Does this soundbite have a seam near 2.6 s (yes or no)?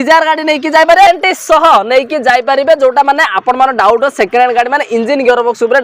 no